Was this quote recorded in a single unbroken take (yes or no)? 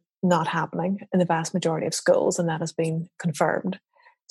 yes